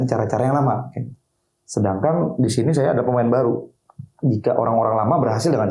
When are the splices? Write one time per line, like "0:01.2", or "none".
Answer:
0:03.7